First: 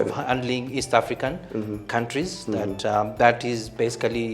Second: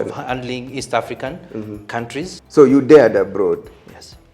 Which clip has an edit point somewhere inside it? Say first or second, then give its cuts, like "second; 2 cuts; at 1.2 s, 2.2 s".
second; 1 cut; at 2.4 s